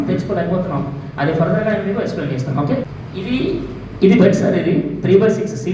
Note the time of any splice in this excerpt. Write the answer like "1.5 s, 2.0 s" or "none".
2.8 s